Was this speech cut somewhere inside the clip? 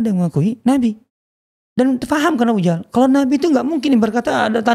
no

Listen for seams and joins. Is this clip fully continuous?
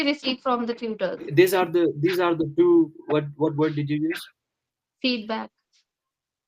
no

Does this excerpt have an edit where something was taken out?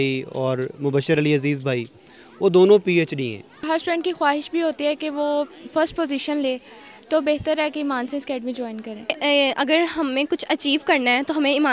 yes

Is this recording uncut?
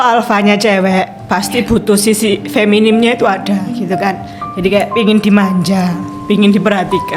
yes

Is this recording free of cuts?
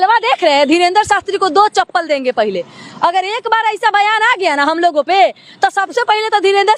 yes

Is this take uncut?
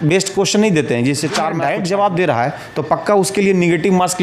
no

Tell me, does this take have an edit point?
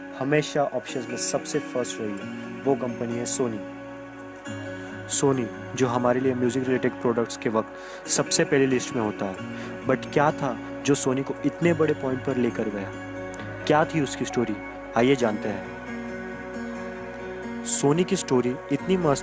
no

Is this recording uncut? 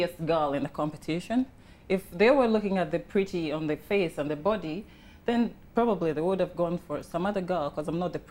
yes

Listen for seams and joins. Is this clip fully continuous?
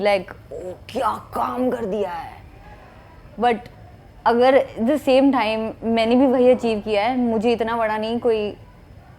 yes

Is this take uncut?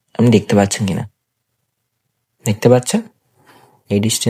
yes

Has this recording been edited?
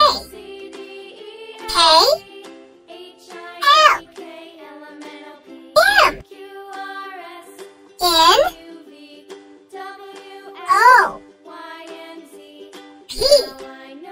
yes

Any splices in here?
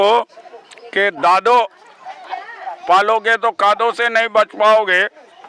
no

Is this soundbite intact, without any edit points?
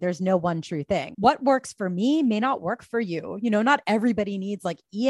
no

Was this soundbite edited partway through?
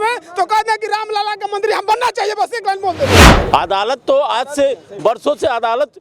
yes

